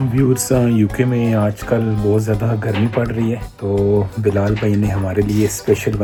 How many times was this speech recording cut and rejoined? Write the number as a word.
zero